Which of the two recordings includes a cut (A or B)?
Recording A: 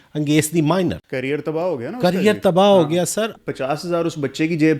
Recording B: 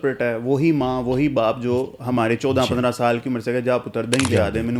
A